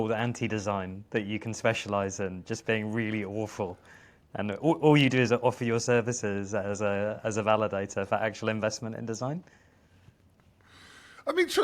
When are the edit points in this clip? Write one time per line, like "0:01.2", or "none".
none